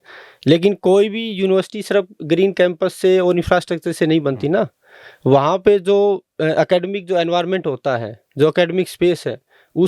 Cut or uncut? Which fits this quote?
uncut